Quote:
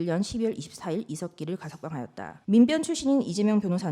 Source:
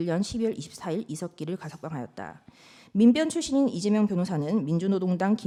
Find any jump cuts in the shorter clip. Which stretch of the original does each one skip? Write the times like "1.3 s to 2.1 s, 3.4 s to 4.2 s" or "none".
2.3 s to 2.7 s